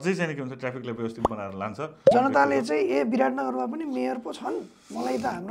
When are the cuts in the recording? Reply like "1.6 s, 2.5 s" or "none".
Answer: 2.1 s